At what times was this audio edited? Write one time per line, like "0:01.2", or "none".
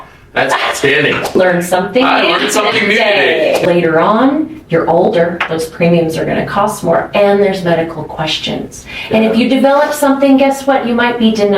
0:01.3
0:03.6